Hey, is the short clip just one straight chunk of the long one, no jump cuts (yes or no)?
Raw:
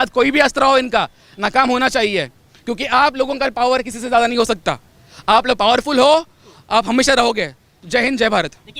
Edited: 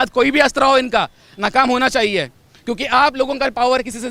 yes